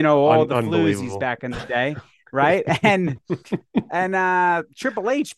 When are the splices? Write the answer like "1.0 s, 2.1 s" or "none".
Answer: none